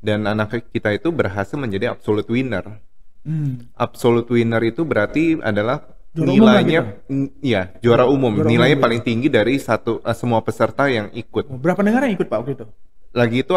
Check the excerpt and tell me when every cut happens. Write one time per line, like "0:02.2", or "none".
none